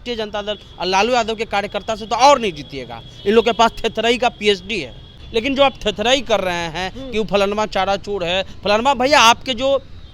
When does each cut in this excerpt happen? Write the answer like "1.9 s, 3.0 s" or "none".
5.2 s